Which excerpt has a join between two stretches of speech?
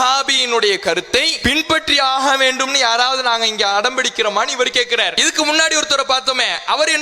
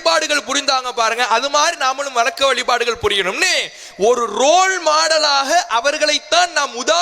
first; 2 cuts; at 1.3 s, 5.2 s

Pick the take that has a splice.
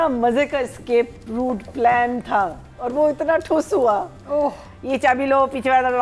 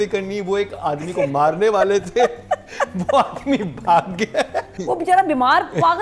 second; 1 cut; at 4.7 s

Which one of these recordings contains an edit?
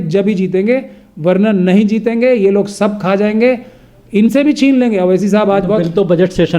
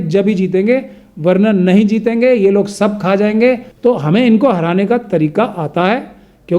second; 1 cut; at 3.7 s

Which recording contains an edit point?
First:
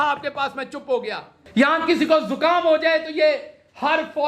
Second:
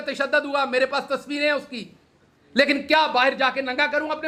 first; 1 cut; at 1.3 s

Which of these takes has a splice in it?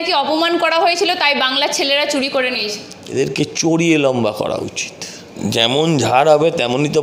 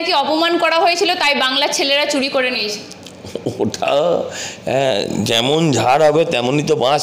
first; 2 cuts; at 2.9 s, 5.4 s

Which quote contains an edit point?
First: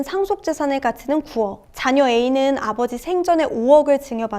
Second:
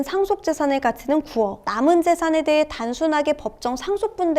second; 1 cut; at 1.7 s

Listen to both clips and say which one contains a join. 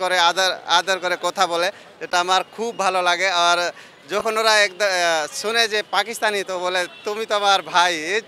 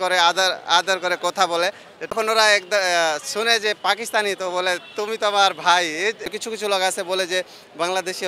second; 2 cuts; at 2.1 s, 6.3 s

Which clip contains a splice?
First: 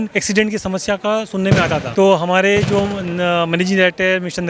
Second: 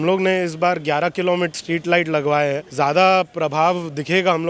second; 2 cuts; at 1.5 s, 2.6 s

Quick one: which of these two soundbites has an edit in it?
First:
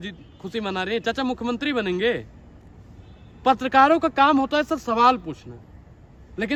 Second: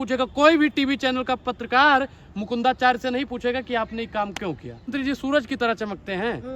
second; 1 cut; at 4.9 s

